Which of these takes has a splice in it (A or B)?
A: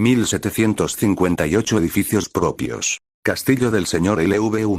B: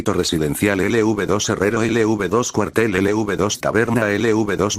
B